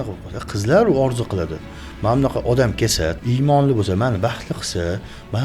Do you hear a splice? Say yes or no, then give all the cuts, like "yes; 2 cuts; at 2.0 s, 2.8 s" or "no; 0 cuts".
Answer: yes; 1 cut; at 3.2 s